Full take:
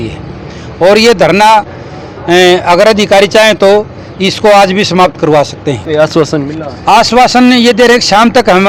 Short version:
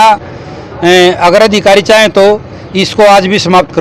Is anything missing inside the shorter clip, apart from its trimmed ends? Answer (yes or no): no